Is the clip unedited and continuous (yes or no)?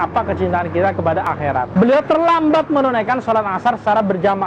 no